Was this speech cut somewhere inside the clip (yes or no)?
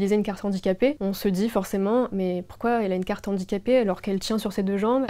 yes